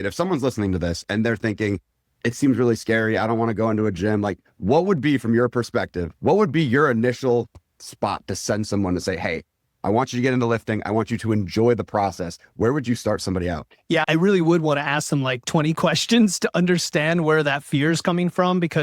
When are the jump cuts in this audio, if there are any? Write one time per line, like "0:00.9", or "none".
0:06.1